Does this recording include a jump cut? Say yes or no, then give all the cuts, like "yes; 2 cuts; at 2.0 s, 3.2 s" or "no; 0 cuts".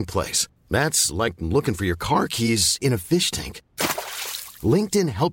no; 0 cuts